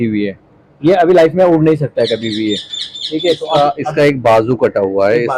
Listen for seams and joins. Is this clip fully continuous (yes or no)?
yes